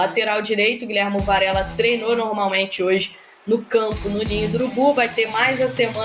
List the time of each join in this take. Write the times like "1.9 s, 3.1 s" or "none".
none